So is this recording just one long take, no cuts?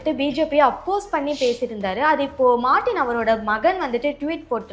yes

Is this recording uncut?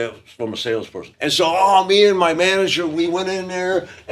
no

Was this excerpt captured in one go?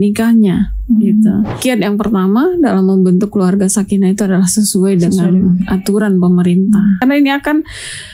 no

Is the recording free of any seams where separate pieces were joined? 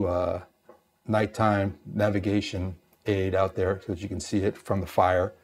yes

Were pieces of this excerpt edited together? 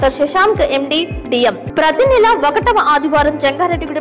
yes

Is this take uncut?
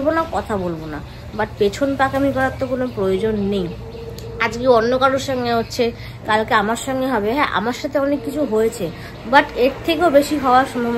yes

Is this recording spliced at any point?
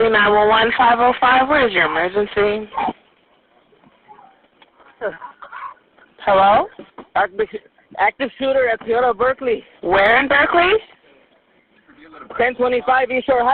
no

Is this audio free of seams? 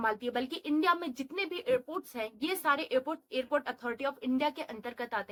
yes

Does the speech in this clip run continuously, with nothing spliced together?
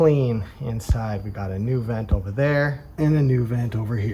no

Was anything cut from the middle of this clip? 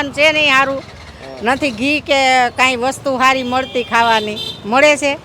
no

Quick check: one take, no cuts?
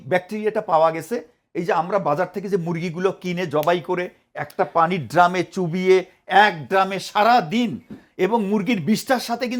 yes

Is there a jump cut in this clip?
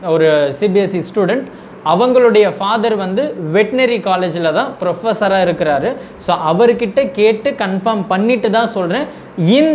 no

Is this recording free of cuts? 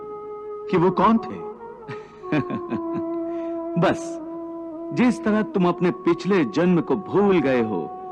yes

